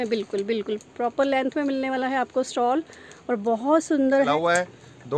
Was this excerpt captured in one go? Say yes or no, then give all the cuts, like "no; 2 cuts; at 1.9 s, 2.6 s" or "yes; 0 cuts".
no; 1 cut; at 4.2 s